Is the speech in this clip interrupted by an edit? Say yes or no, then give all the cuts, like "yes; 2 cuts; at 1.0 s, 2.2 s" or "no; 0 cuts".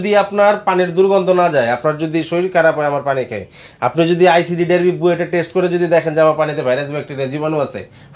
no; 0 cuts